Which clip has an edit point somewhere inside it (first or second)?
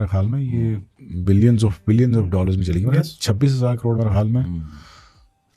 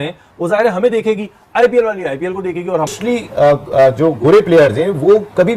second